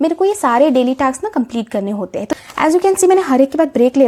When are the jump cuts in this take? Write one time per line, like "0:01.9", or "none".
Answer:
0:02.2